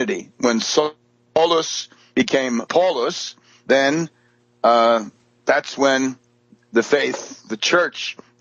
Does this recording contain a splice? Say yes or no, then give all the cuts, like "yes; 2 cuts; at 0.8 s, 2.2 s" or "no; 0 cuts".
no; 0 cuts